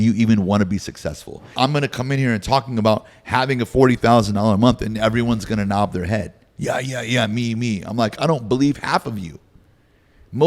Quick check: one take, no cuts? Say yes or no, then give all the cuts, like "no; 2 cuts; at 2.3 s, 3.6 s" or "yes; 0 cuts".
no; 1 cut; at 1.5 s